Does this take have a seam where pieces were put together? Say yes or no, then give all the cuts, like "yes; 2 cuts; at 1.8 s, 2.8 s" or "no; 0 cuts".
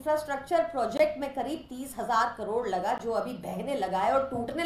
no; 0 cuts